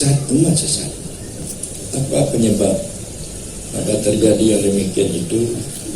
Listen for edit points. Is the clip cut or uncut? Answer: cut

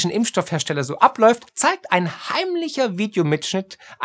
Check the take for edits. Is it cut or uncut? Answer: uncut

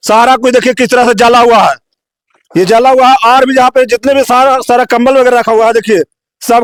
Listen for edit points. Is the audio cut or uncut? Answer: uncut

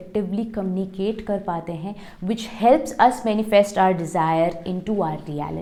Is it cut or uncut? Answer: uncut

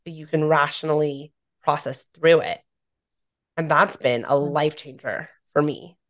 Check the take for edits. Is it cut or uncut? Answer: uncut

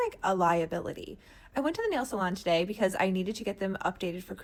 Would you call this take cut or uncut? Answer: uncut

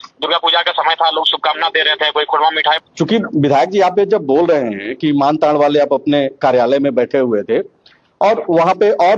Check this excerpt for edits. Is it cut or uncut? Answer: cut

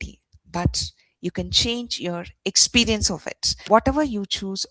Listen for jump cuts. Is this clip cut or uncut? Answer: cut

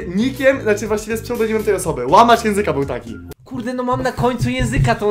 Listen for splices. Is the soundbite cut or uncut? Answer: cut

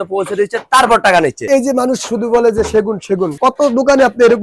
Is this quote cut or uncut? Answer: uncut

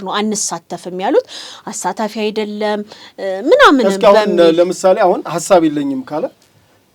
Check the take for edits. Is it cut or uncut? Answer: uncut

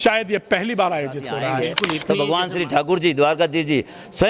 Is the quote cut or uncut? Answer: cut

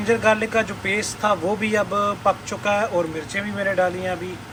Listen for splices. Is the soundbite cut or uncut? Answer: uncut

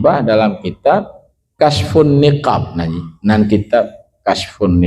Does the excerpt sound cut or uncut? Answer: cut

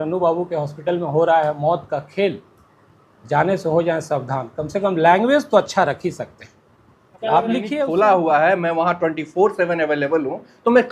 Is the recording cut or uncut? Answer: cut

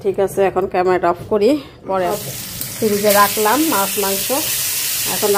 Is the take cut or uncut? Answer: cut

